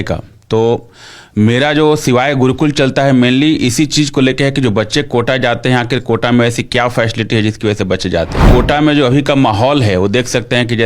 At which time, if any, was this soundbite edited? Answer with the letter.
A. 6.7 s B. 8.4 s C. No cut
B